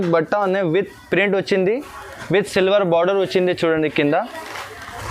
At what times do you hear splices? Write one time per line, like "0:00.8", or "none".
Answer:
none